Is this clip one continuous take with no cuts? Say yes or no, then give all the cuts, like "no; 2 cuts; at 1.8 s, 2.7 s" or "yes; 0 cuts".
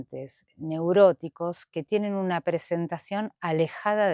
yes; 0 cuts